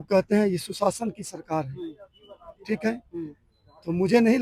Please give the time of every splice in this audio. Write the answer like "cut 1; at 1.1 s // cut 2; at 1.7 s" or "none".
none